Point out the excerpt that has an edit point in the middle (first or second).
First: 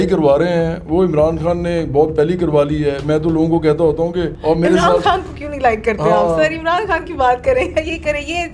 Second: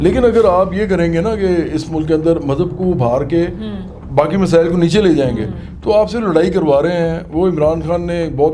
first